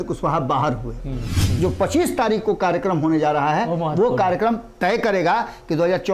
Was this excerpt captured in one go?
no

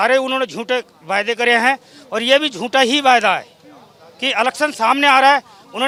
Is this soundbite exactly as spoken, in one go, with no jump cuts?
yes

